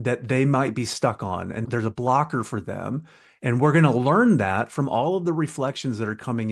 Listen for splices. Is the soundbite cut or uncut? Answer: cut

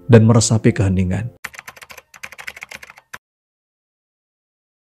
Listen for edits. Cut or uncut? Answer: uncut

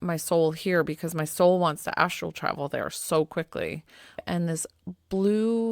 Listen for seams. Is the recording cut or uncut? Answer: cut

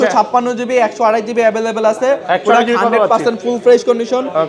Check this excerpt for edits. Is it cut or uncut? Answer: uncut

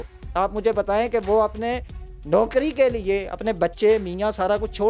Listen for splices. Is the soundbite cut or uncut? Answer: uncut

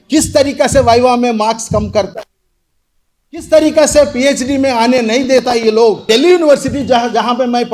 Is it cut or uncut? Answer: cut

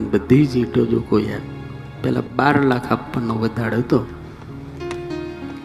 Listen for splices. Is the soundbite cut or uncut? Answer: uncut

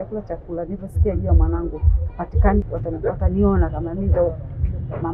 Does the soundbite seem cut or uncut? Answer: cut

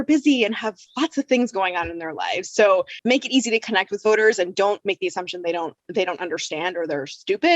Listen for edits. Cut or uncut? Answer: cut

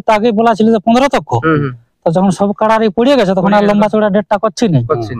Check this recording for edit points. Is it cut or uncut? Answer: uncut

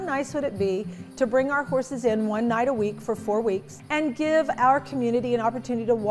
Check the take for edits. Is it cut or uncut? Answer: cut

